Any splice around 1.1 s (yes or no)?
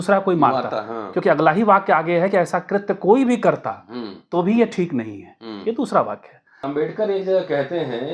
no